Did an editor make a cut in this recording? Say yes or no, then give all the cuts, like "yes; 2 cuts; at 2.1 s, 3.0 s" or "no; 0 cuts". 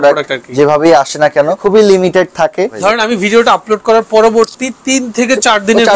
yes; 2 cuts; at 1.6 s, 2.8 s